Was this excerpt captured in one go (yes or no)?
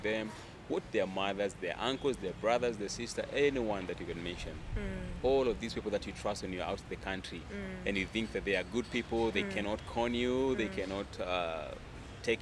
yes